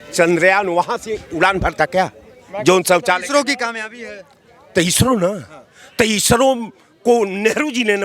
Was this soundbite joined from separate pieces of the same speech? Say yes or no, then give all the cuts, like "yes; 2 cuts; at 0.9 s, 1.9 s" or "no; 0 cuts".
no; 0 cuts